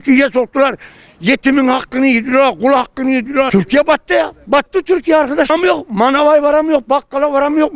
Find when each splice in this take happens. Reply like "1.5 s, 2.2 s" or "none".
3.5 s, 5.5 s